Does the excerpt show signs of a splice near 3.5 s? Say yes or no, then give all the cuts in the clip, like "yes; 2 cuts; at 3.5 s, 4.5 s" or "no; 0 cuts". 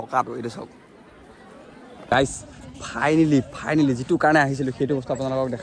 no; 1 cut; at 2.1 s